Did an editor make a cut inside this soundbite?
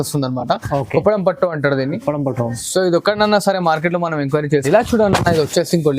yes; 1 cut; at 4.6 s

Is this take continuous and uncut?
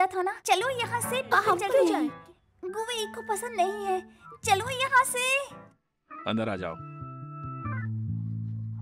no; 1 cut; at 1.8 s

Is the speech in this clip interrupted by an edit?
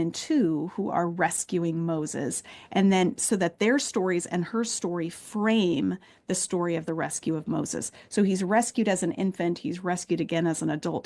no; 0 cuts

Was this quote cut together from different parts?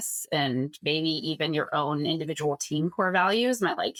no; 0 cuts

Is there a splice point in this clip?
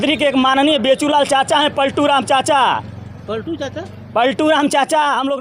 no; 0 cuts

